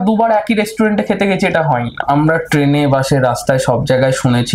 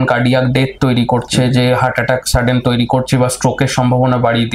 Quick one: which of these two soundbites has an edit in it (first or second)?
first